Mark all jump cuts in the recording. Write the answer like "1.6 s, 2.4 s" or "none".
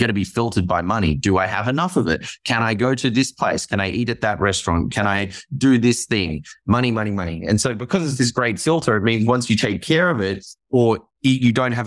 none